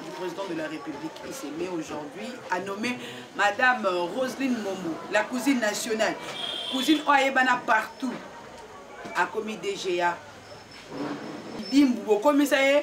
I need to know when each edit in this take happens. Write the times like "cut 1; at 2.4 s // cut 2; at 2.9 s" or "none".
cut 1; at 11.6 s